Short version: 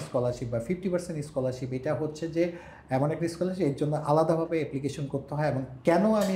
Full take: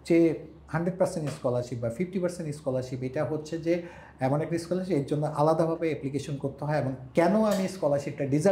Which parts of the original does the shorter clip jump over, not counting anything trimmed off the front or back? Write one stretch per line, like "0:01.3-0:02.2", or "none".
none